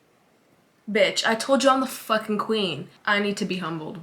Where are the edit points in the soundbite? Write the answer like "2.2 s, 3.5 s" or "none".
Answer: 2.9 s